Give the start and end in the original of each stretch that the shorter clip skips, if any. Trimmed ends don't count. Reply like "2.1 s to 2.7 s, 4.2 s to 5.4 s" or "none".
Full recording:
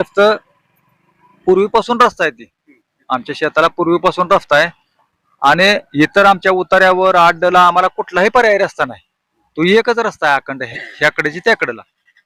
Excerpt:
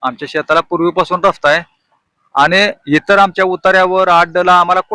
none